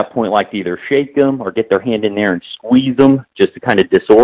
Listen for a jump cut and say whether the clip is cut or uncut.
uncut